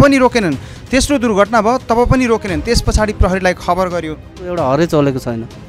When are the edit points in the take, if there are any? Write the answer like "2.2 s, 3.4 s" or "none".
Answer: 4.5 s